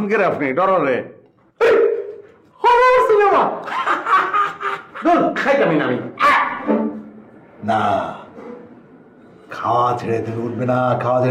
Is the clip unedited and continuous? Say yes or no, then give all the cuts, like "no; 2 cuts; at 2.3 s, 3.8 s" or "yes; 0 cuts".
yes; 0 cuts